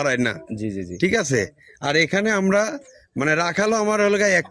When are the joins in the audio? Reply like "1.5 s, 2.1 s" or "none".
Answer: none

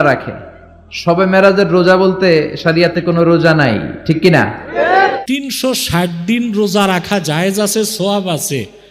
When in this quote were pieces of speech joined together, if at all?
5.2 s

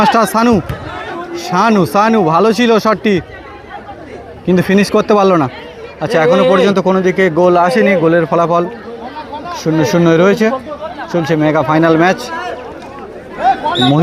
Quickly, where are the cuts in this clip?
none

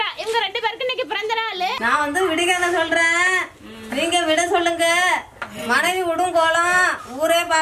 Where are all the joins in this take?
1.8 s

